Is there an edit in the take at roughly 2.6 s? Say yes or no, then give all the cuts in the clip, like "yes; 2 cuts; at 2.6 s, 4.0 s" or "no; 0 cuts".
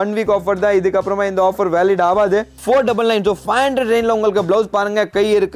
yes; 1 cut; at 2.6 s